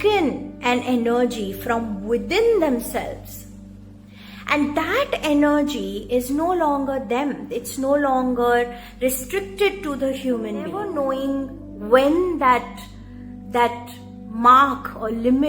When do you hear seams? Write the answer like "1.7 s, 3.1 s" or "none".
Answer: 10.9 s